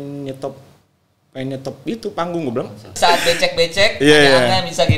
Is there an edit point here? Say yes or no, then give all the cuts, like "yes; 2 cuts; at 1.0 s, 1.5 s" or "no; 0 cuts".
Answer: yes; 1 cut; at 2.9 s